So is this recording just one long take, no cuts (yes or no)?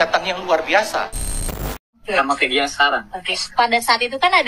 no